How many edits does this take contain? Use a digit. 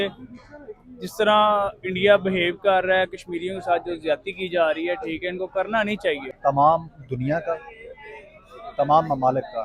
1